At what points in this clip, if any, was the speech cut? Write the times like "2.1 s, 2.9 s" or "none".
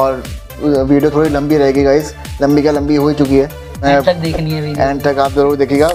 3.8 s